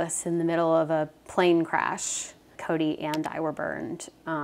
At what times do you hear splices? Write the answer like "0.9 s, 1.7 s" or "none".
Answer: 2.6 s